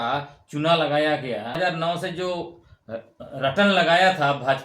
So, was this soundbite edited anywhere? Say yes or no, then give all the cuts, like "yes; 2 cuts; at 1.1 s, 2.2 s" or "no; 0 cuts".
yes; 1 cut; at 1.6 s